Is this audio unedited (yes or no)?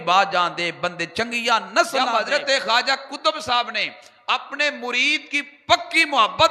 no